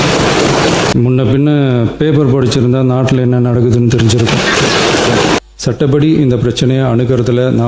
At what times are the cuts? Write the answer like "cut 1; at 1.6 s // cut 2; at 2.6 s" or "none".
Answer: cut 1; at 0.9 s // cut 2; at 5.4 s

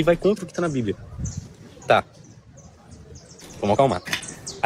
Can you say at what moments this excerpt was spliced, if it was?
none

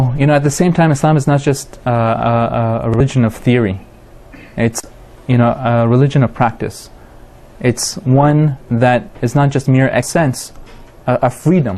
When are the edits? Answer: none

